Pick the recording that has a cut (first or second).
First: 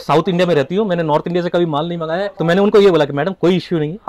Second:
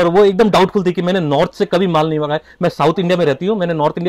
first